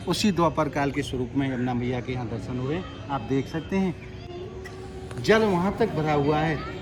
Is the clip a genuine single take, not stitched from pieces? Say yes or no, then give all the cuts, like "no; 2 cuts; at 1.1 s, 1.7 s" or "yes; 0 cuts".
yes; 0 cuts